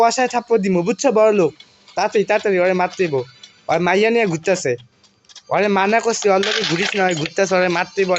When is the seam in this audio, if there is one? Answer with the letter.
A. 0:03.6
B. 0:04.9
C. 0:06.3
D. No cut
D